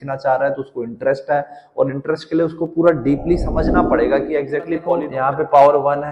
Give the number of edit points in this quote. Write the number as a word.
one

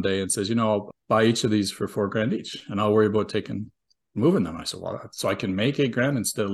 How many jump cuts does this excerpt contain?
one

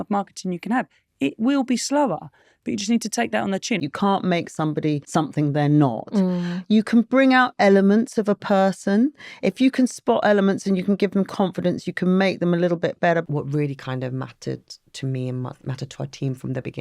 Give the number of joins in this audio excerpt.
three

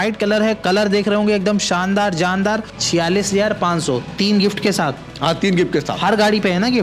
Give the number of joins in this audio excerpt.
one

